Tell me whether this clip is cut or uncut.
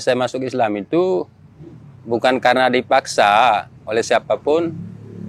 uncut